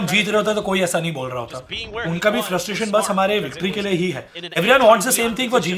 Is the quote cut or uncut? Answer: uncut